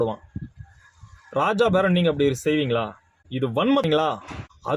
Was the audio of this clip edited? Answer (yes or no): yes